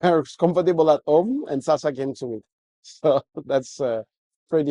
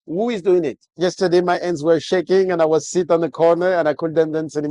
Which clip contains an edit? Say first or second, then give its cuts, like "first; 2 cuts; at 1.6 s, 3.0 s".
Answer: second; 1 cut; at 0.9 s